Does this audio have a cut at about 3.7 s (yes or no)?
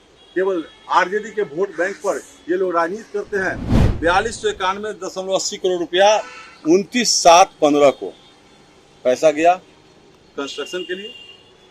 yes